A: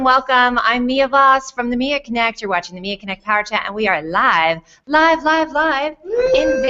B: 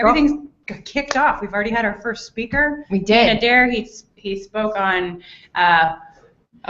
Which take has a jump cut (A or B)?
B